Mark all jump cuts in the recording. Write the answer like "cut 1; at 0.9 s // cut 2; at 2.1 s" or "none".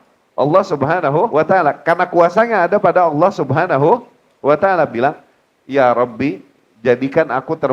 cut 1; at 1.3 s